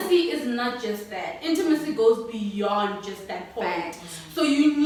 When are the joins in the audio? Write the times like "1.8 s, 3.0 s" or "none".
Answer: none